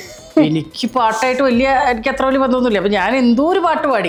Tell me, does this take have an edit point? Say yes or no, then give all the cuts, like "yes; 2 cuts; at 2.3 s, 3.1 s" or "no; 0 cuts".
no; 0 cuts